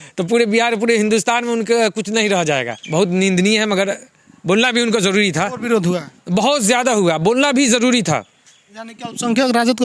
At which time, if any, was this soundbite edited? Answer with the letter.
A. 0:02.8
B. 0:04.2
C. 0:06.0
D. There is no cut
A